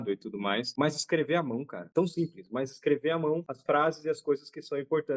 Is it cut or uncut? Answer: uncut